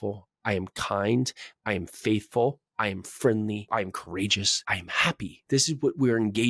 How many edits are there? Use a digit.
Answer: 1